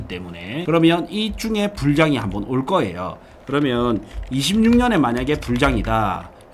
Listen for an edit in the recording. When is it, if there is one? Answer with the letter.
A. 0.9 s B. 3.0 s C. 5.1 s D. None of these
D